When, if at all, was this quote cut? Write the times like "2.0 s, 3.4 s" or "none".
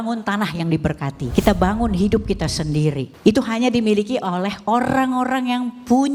1.2 s, 3.1 s